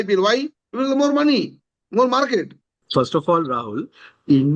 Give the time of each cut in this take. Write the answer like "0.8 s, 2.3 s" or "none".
2.8 s